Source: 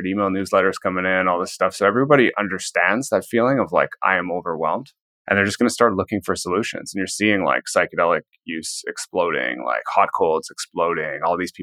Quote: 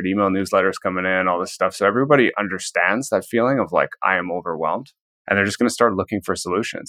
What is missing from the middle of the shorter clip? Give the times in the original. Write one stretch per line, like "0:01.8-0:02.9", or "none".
none